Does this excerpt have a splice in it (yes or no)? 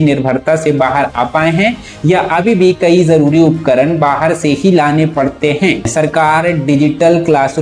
yes